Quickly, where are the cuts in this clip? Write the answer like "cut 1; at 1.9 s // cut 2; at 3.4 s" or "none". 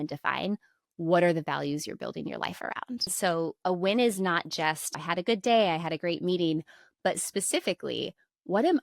cut 1; at 3.1 s // cut 2; at 4.9 s

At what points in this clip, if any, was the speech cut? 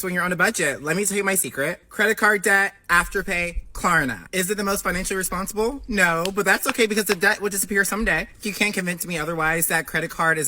none

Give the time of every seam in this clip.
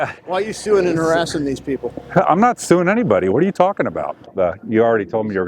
cut 1; at 4.2 s

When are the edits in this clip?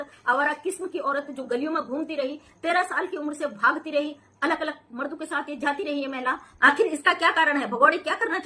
cut 1; at 6.5 s

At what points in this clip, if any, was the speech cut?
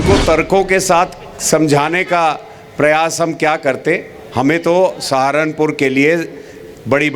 none

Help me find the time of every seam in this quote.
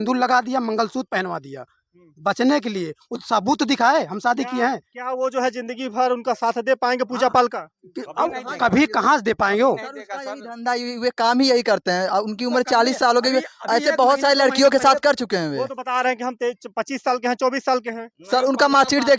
none

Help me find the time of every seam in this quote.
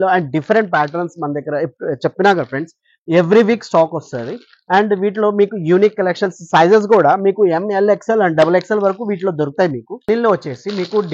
cut 1; at 9.9 s

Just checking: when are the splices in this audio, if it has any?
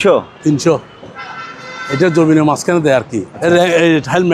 cut 1; at 3.2 s

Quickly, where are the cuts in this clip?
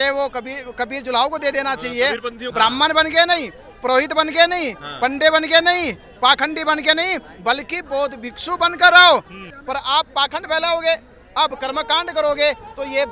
cut 1; at 2.4 s // cut 2; at 9.5 s

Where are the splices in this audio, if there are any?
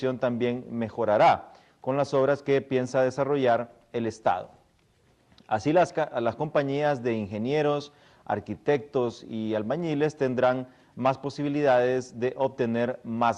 cut 1; at 4.0 s

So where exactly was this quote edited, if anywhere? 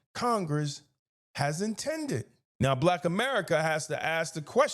cut 1; at 2.4 s

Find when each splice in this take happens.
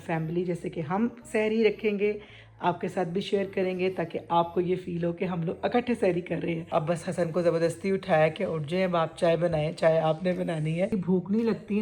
cut 1; at 6.6 s // cut 2; at 11.0 s

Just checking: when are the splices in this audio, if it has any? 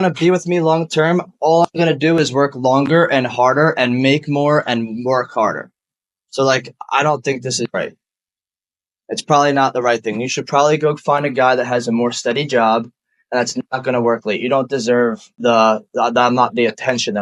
none

